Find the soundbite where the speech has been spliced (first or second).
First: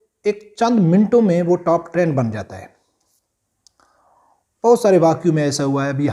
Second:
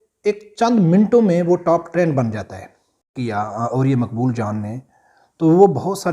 second